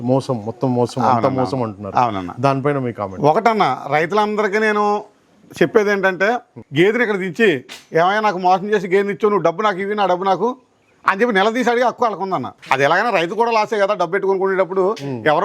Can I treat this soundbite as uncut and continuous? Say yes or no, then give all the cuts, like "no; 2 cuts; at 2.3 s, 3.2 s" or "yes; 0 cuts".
no; 2 cuts; at 6.6 s, 12.5 s